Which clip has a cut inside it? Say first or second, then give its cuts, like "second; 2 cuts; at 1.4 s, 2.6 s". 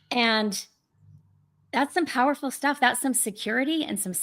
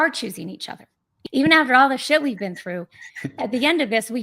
second; 1 cut; at 1.1 s